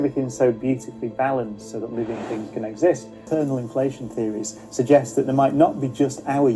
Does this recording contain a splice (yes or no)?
yes